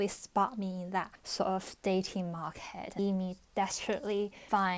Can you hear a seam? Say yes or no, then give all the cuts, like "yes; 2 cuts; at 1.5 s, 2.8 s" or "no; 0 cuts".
yes; 2 cuts; at 1.2 s, 3.0 s